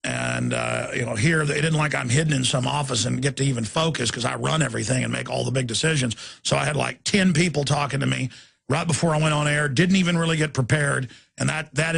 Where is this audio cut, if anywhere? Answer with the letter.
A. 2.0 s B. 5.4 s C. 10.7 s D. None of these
A